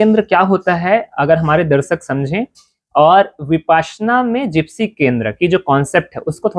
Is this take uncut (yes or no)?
yes